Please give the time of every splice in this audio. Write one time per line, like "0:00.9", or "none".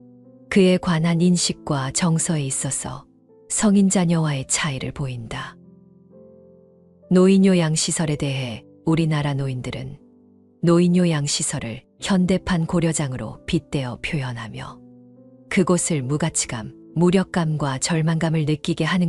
none

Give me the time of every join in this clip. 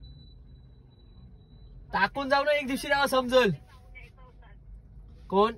0:04.0

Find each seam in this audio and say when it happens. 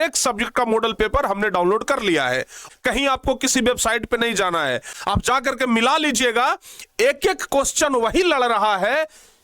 0:02.6
0:04.9

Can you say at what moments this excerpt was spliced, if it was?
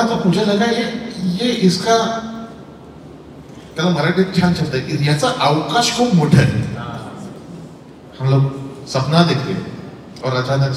0:08.0

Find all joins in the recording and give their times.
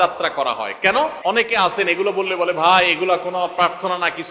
0:01.2

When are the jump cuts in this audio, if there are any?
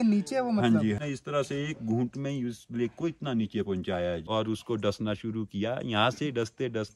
0:01.0
0:04.2

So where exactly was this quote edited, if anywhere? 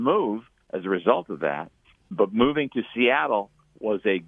0:02.0

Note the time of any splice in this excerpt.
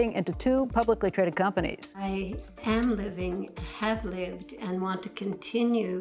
0:02.0

